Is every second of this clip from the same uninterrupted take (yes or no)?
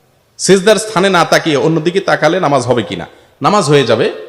yes